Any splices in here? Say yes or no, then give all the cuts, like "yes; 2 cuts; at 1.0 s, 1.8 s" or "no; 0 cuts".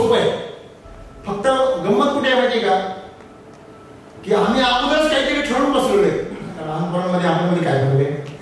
yes; 1 cut; at 6.8 s